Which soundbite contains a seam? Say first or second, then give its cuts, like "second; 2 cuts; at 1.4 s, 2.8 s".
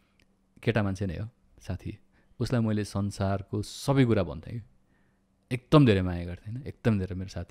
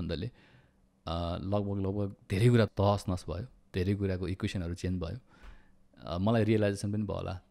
second; 1 cut; at 2.7 s